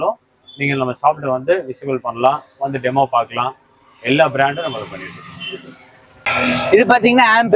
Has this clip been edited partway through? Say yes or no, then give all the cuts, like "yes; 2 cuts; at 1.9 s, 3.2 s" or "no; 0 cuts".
no; 0 cuts